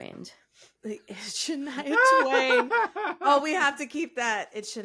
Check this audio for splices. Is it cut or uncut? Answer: uncut